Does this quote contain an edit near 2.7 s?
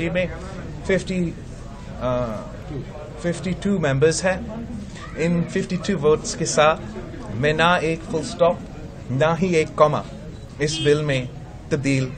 no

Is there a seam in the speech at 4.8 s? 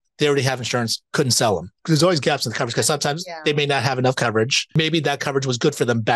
yes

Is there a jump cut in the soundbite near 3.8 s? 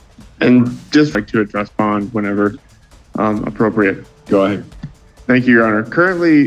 no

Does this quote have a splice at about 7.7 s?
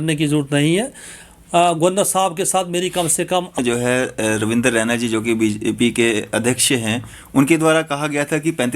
no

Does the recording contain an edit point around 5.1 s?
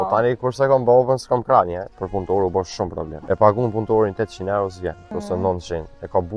yes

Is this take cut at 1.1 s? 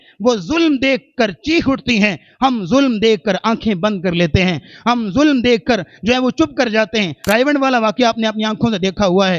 no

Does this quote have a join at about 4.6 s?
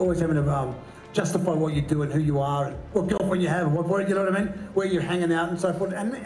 no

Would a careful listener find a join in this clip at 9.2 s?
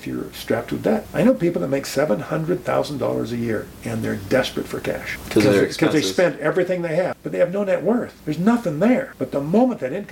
yes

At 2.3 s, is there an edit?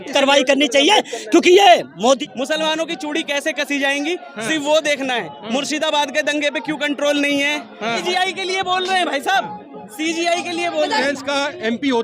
yes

